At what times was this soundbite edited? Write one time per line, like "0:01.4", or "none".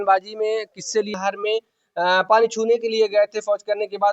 0:01.1